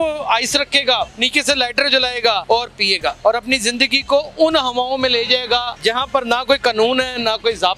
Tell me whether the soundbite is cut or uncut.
cut